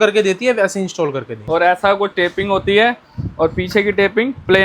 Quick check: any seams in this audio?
yes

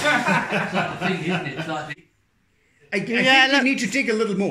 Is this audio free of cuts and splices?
no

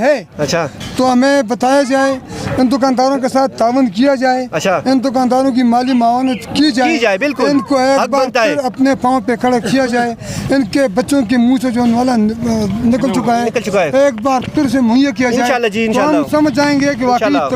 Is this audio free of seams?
yes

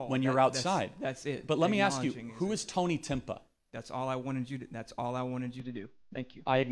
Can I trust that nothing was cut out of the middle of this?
yes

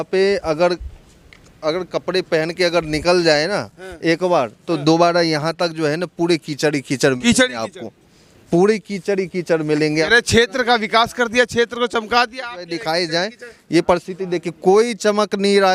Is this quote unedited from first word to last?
yes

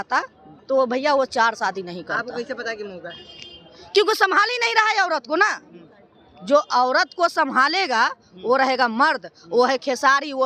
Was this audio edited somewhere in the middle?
no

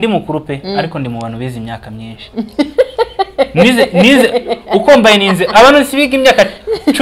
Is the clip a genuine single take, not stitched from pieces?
yes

